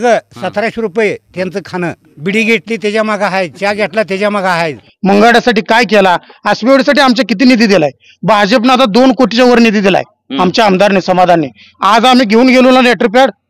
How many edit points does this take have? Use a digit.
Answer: 2